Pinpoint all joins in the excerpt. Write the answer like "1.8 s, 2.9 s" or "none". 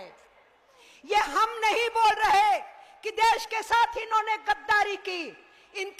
none